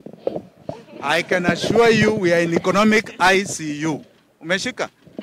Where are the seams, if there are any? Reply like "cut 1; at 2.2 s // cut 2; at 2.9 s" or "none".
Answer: none